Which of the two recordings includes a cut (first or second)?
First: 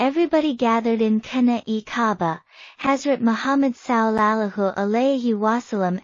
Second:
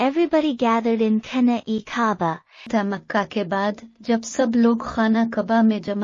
first